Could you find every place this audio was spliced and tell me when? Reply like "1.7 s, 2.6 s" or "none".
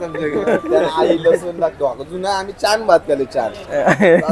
1.8 s